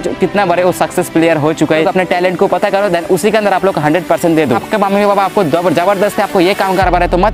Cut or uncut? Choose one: cut